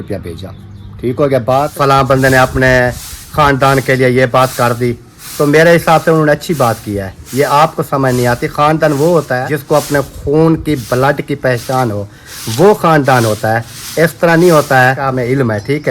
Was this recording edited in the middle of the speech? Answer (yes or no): yes